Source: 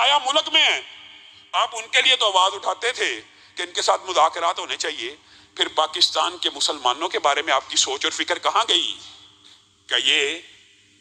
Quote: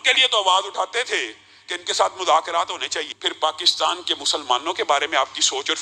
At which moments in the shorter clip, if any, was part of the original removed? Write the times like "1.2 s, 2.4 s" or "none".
3.1 s